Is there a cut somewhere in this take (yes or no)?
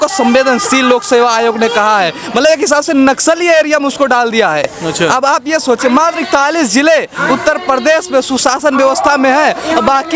no